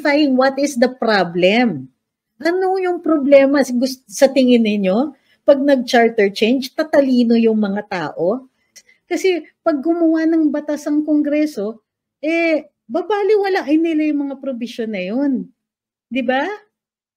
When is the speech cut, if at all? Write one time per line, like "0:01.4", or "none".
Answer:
0:08.7